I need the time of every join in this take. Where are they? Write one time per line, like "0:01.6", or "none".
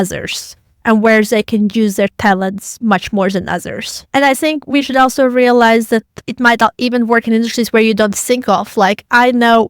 0:04.0